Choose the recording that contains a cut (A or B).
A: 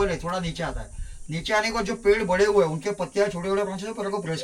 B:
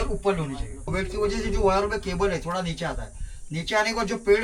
B